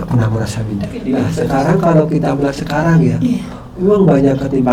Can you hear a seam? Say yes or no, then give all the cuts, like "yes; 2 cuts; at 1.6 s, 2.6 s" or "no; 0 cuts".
yes; 1 cut; at 0.9 s